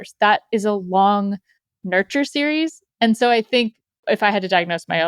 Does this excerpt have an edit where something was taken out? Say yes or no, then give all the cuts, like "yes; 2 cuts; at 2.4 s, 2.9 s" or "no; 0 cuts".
yes; 1 cut; at 3.9 s